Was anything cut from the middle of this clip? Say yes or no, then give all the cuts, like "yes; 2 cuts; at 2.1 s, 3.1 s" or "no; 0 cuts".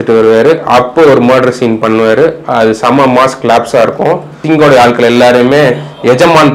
yes; 1 cut; at 4.4 s